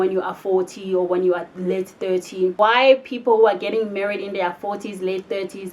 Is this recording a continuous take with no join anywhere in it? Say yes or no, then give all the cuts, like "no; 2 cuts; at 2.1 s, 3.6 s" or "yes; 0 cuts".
no; 1 cut; at 2.6 s